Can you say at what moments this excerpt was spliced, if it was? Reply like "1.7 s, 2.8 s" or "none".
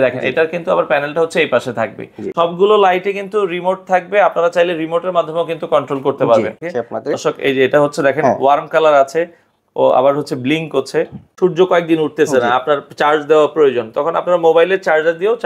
2.3 s, 6.7 s, 11.4 s